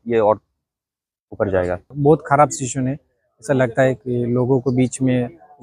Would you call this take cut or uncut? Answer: cut